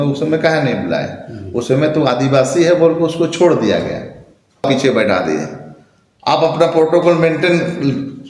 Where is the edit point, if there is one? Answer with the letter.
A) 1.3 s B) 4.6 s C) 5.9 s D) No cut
B